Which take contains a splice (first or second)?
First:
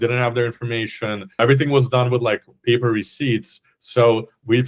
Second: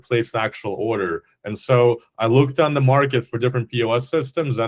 first